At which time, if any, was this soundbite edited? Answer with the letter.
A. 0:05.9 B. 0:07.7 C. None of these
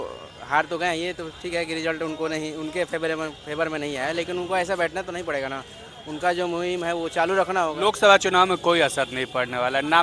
B